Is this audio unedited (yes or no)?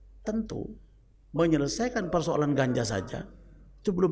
yes